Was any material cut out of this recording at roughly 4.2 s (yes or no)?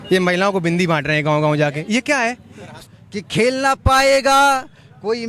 no